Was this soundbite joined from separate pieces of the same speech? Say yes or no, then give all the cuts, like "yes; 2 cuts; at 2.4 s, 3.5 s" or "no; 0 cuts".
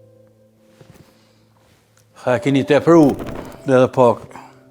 yes; 1 cut; at 3.3 s